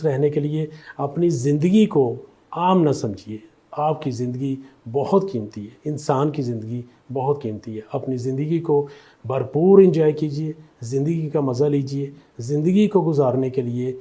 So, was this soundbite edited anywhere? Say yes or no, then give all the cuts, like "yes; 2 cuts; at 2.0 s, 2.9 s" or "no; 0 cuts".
no; 0 cuts